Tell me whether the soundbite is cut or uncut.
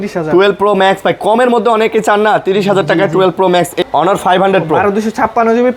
cut